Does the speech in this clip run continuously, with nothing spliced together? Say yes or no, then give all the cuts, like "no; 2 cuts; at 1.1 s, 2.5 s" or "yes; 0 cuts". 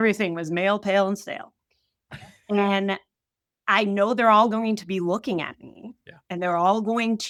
yes; 0 cuts